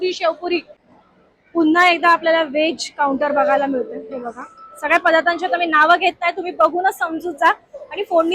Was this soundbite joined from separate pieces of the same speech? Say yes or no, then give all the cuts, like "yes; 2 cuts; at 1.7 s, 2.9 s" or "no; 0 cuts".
yes; 1 cut; at 1.2 s